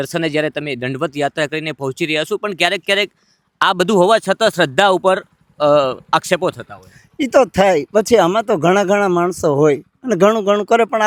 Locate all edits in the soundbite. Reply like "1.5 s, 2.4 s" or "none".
none